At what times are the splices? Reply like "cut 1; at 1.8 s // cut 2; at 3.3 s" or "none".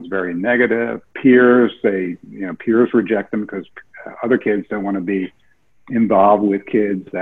cut 1; at 1.0 s